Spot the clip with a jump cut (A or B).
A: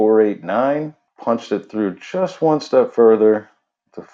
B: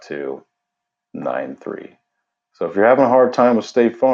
A